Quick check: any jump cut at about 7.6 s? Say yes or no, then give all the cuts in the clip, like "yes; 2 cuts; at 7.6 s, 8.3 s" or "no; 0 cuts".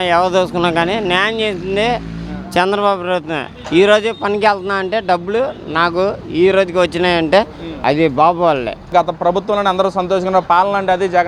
yes; 2 cuts; at 7.6 s, 8.9 s